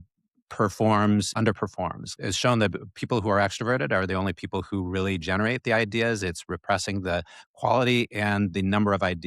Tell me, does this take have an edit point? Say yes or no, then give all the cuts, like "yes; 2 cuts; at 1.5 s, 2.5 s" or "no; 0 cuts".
yes; 1 cut; at 1.6 s